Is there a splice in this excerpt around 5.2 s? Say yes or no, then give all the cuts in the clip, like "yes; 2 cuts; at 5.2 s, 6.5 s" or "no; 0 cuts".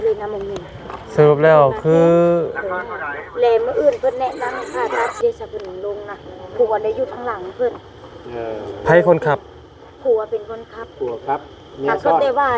yes; 1 cut; at 5.2 s